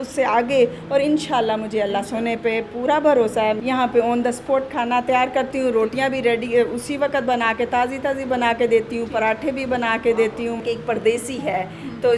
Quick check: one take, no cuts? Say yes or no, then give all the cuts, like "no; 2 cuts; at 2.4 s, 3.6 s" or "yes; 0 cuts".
no; 2 cuts; at 3.6 s, 10.6 s